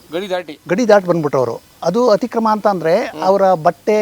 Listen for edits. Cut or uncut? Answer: cut